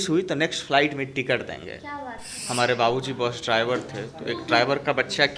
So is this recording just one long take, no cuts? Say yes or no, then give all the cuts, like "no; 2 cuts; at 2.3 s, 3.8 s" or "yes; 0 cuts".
no; 1 cut; at 2.3 s